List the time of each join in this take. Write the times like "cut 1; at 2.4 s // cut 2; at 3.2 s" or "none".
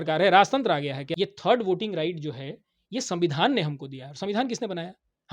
cut 1; at 1.0 s